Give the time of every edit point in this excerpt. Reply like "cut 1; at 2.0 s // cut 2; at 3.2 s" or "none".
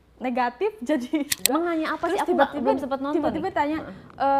cut 1; at 1.4 s